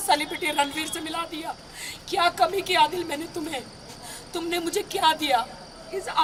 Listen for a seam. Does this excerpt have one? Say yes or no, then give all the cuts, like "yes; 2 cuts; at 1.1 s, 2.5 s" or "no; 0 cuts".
no; 0 cuts